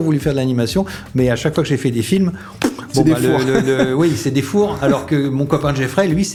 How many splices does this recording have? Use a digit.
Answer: 0